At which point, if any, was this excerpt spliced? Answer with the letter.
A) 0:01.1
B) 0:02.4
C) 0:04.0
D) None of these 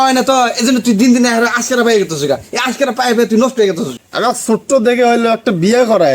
C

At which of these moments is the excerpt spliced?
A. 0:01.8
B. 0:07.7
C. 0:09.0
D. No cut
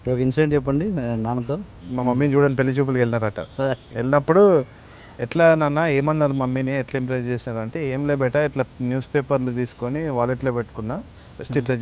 A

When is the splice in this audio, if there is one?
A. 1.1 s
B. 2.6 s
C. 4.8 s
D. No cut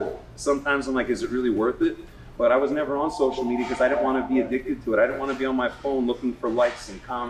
D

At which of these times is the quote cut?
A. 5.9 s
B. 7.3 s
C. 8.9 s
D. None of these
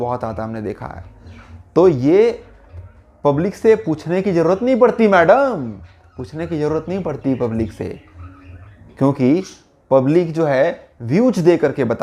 D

